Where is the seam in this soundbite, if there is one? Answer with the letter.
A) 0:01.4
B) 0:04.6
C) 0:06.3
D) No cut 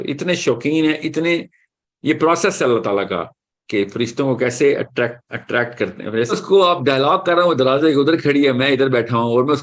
C